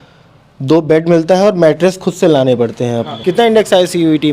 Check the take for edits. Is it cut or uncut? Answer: cut